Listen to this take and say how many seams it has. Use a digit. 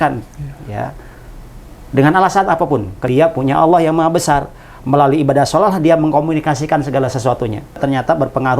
2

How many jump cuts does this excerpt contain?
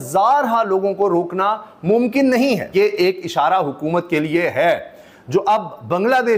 1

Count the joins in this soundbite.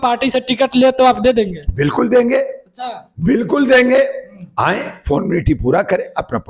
0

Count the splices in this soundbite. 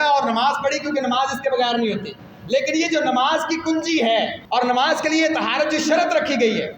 1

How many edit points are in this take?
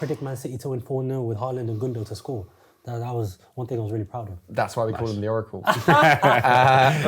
0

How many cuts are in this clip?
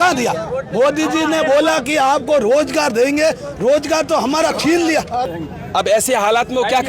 1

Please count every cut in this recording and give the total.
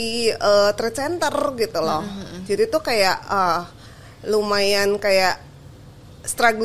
0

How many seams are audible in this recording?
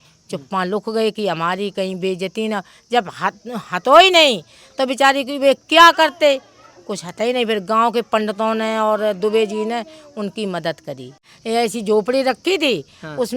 1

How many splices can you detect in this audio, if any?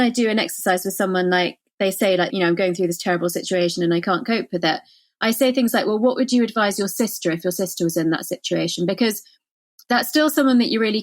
1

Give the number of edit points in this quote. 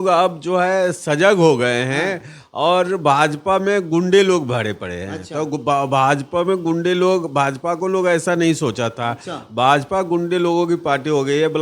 0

